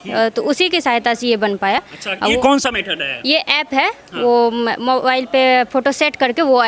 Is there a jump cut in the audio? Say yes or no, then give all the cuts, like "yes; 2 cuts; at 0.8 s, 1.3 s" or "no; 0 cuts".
no; 0 cuts